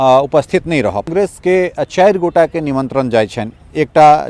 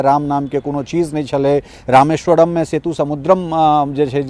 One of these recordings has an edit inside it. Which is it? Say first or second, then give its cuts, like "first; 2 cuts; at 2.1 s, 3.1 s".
first; 1 cut; at 1.1 s